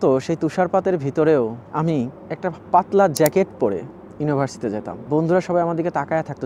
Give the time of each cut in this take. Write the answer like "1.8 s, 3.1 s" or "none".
none